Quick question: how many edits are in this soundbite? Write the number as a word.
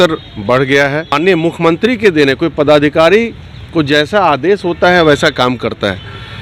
one